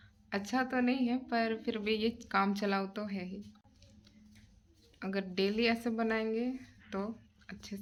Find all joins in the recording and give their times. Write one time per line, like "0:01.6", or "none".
none